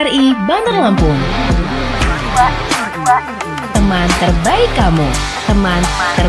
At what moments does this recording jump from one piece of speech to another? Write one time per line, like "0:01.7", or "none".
none